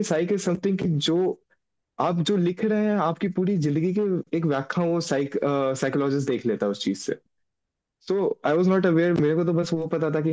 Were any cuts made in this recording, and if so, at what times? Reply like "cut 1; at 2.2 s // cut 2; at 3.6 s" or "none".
none